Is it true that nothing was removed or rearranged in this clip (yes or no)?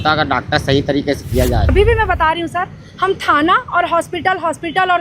no